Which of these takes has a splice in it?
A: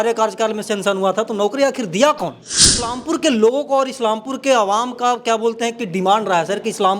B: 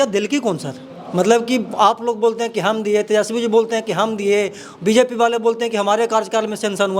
A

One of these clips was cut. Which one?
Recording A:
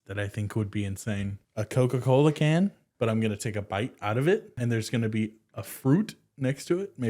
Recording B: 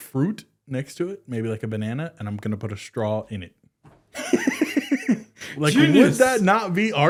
A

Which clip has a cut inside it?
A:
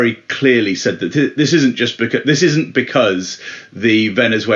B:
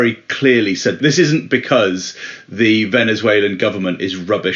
B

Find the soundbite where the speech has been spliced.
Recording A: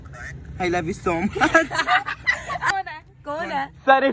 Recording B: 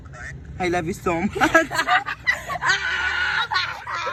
A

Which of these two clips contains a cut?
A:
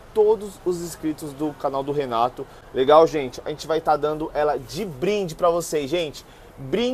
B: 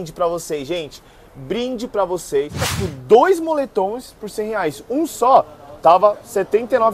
B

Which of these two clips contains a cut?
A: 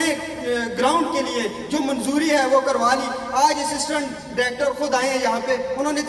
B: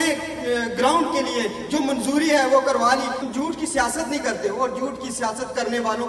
B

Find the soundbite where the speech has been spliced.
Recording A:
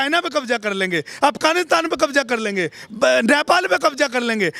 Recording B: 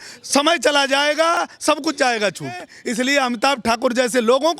B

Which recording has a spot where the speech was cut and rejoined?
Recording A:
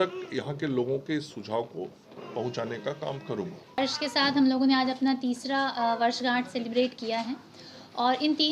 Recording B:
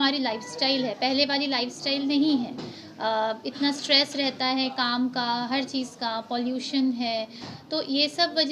A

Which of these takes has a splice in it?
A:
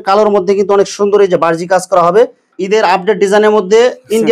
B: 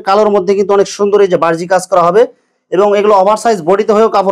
A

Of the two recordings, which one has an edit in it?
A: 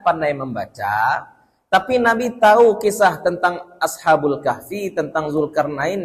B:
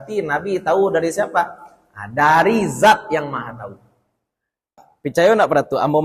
B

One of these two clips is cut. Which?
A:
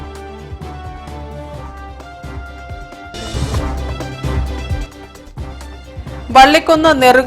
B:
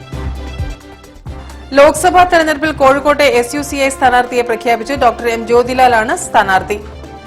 A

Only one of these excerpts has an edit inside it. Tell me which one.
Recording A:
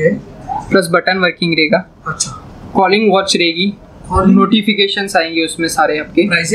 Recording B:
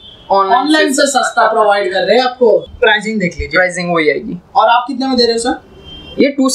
B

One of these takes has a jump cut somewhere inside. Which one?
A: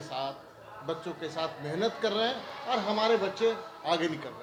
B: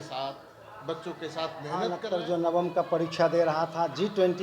B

